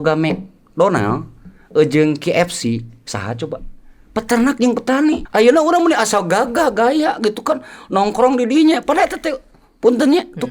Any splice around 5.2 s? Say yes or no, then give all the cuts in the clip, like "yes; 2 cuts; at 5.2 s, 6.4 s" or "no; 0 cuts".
yes; 1 cut; at 5.2 s